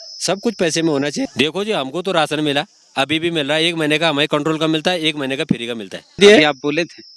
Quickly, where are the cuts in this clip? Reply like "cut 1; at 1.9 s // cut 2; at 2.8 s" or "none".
cut 1; at 1.3 s // cut 2; at 6.2 s